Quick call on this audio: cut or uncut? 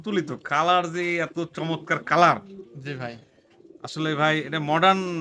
uncut